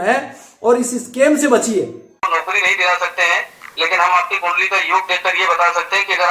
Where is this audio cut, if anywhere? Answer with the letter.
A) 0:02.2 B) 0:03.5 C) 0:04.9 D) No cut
A